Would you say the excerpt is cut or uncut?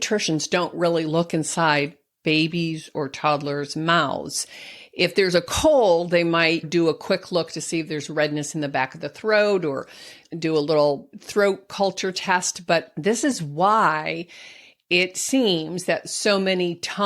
cut